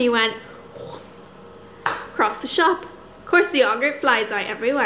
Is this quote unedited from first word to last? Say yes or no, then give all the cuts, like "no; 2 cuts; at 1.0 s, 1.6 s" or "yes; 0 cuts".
yes; 0 cuts